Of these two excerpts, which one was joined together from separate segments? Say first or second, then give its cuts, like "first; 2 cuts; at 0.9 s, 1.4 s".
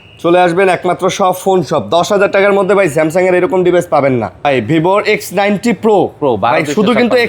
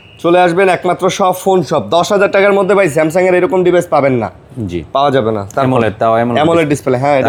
first; 1 cut; at 4.5 s